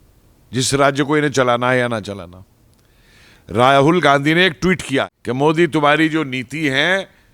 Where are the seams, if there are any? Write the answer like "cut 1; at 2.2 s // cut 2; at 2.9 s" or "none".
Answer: cut 1; at 5.1 s